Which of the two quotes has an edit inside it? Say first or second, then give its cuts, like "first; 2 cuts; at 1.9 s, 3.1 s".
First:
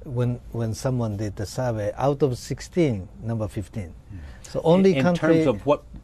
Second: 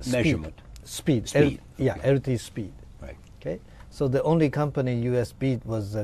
first; 1 cut; at 4.8 s